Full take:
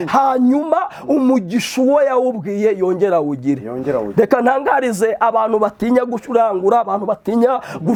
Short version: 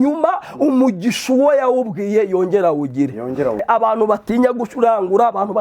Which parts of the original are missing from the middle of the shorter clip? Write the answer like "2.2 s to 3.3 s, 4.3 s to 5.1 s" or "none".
4.1 s to 5.1 s

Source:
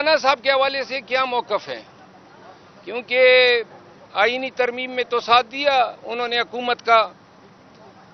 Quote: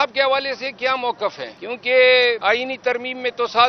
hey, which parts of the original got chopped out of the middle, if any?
1.8 s to 2.7 s, 3.6 s to 4.1 s

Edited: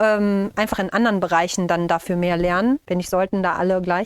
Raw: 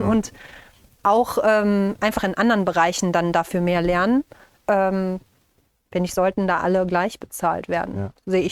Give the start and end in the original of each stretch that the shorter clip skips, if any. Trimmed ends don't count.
4.3 s to 5.9 s

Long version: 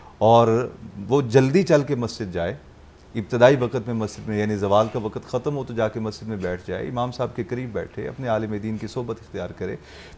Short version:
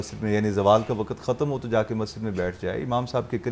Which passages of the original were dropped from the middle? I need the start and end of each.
none

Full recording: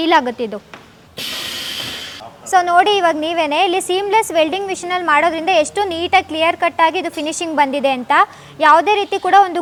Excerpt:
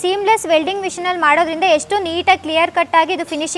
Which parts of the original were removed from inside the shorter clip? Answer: none

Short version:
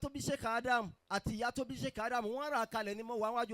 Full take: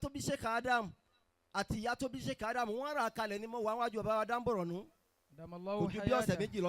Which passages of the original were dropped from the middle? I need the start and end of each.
1.0 s to 1.4 s

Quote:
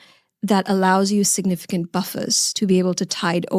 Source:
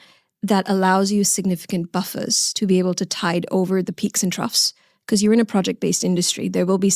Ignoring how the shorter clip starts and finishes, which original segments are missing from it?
none

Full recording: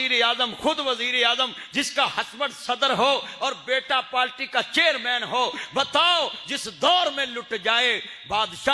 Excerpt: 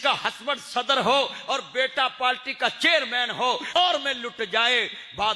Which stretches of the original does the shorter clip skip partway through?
5.7 s to 6.9 s

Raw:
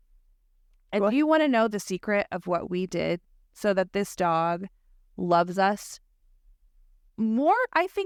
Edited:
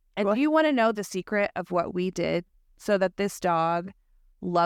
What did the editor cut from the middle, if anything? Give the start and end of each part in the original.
none

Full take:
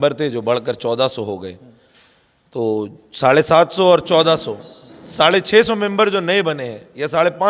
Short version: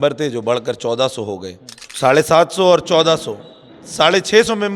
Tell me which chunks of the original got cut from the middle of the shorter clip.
1.8 s to 3.0 s

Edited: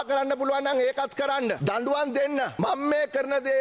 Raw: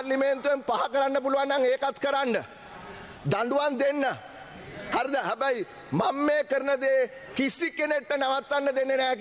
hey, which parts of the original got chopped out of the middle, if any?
2.4 s to 3.2 s, 4.2 s to 5.9 s

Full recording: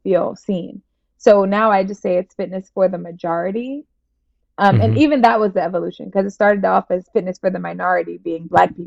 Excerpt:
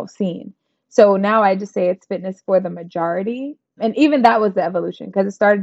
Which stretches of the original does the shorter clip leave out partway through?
4.1 s to 4.8 s

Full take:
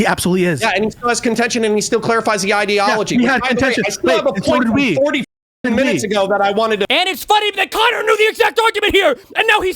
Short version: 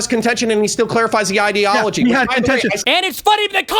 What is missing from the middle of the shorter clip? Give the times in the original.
4.0 s to 6.9 s

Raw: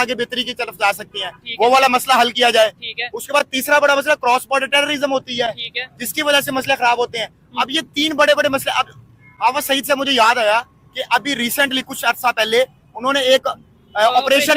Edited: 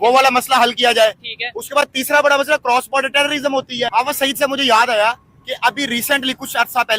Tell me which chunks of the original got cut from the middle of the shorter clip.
5.5 s to 9.4 s

